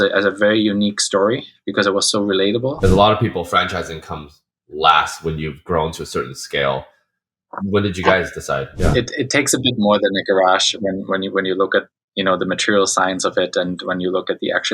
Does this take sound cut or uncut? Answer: cut